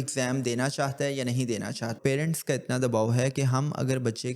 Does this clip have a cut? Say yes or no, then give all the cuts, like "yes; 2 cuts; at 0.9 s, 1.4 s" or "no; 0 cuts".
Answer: yes; 1 cut; at 1.7 s